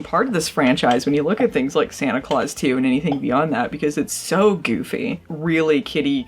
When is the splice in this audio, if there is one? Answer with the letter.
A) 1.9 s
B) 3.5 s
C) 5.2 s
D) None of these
C